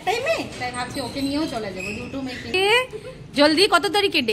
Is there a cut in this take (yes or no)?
yes